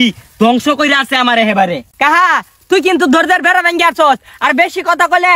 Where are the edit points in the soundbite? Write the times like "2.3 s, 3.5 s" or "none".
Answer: 1.8 s